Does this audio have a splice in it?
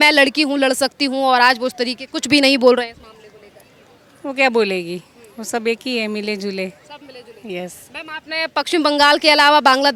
no; 0 cuts

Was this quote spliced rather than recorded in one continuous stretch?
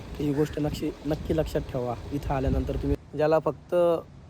yes; 1 cut; at 3.0 s

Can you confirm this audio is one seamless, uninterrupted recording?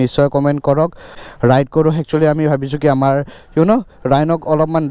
yes; 0 cuts

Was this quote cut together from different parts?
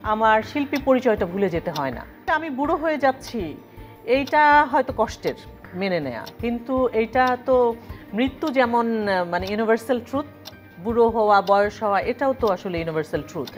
yes; 1 cut; at 2.3 s

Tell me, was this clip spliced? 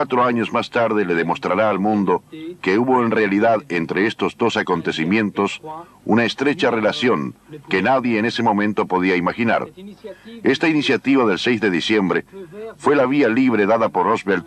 no; 0 cuts

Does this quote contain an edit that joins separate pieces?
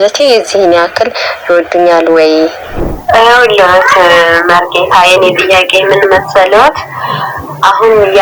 yes; 1 cut; at 2.7 s

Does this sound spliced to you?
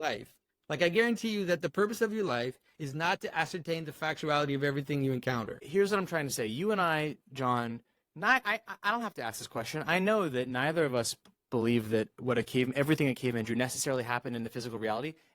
yes; 1 cut; at 5.5 s

